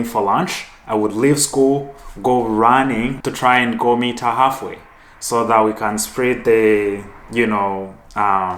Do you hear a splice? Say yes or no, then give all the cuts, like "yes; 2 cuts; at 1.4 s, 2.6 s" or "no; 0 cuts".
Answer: yes; 1 cut; at 3.1 s